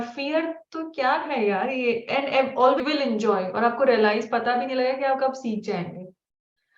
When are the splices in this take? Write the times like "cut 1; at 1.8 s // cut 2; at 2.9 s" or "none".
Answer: cut 1; at 2.8 s